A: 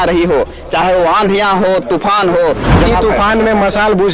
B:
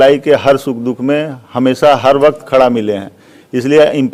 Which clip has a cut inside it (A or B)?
A